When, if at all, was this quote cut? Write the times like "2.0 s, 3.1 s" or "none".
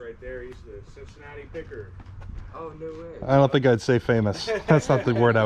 none